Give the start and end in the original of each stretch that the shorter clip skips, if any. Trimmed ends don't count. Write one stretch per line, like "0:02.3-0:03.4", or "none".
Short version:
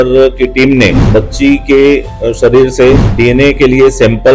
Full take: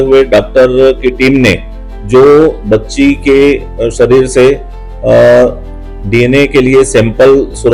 0:01.7-0:02.6
0:04.7-0:06.0